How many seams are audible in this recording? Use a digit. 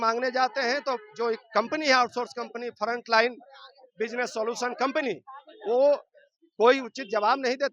0